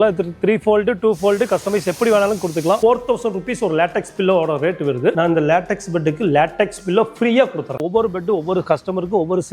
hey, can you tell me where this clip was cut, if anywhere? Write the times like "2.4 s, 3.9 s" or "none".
2.8 s, 5.1 s, 7.8 s